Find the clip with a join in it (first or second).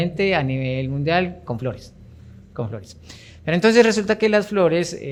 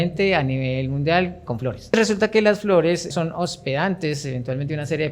second